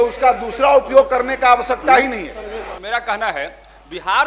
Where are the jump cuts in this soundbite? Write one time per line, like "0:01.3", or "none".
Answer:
0:02.8